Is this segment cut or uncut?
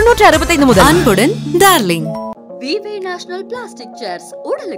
uncut